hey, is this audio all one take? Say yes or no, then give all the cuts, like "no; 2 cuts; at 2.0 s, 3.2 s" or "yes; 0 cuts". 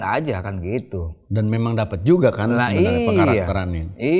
yes; 0 cuts